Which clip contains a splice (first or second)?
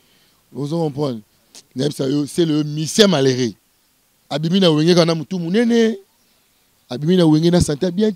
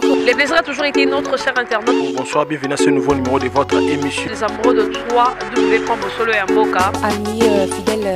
first